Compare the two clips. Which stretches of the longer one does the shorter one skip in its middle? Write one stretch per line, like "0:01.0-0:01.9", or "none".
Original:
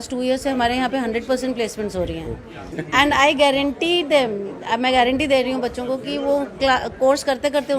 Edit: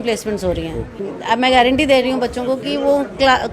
0:02.6-0:04.5

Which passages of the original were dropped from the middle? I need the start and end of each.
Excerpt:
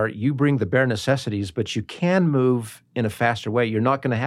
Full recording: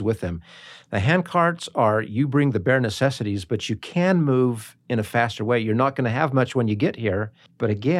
none

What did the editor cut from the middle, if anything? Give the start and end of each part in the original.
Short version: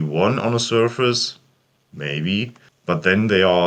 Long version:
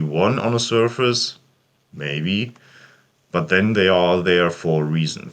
0:02.7-0:03.1

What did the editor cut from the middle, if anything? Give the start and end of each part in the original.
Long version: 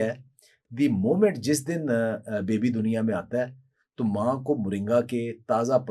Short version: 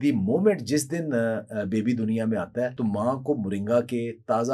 0:03.5-0:03.9

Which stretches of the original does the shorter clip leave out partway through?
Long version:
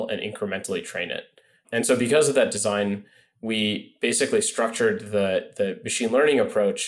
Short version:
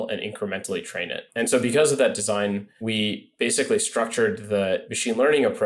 0:01.2-0:01.6
0:03.1-0:03.3
0:05.5-0:05.8

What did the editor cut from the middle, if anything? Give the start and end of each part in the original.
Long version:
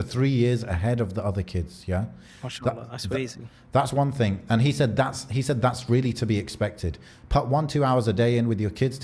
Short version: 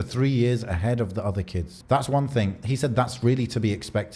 0:01.7-0:03.6
0:04.4-0:05.2

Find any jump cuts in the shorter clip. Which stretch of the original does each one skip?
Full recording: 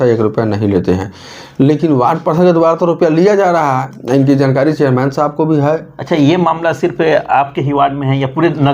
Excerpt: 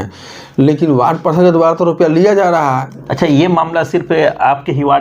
0:04.0-0:05.9

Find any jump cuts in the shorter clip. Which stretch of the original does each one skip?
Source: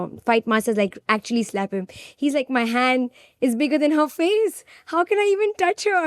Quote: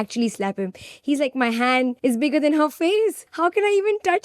0:03.1-0:03.3
0:04.6-0:04.8

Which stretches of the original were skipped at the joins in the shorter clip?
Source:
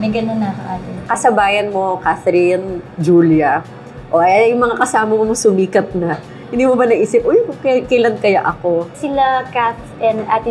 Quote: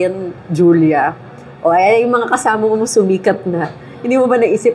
none

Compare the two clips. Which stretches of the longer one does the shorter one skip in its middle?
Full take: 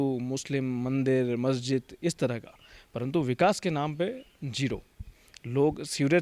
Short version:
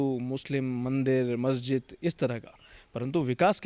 none

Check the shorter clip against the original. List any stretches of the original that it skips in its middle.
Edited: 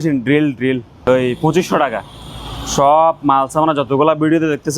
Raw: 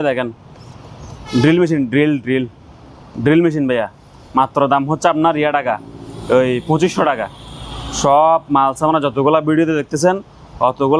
0:03.0-0:06.6

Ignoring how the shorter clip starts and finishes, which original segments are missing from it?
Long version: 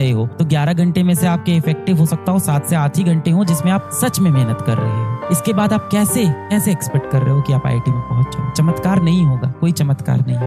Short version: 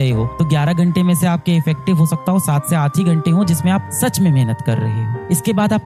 none

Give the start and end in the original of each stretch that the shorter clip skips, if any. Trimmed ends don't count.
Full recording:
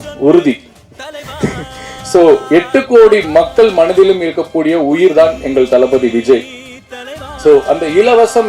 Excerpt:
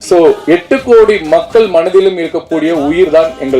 none

